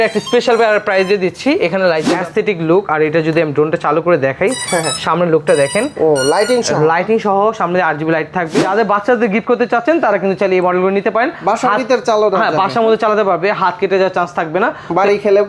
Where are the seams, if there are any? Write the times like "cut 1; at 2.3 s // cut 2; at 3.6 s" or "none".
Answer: cut 1; at 2.1 s // cut 2; at 8.6 s